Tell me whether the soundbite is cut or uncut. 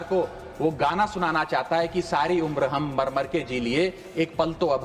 uncut